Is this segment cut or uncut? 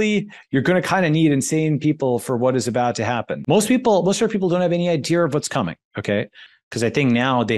cut